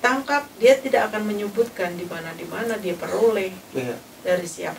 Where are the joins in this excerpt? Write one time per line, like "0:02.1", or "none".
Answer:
none